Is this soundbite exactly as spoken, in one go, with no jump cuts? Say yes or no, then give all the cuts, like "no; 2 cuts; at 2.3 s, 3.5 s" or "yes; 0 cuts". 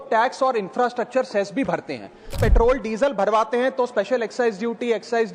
no; 1 cut; at 2.4 s